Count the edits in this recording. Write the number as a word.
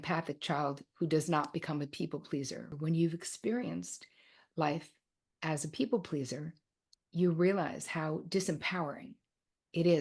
one